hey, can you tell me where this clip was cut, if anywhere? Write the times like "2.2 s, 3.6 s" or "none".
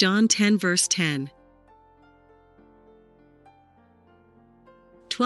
none